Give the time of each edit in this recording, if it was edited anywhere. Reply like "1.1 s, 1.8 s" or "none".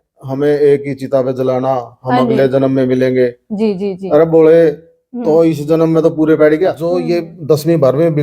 7.0 s